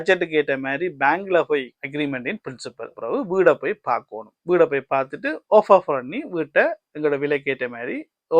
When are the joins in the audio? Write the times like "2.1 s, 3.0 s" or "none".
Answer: 1.8 s, 2.9 s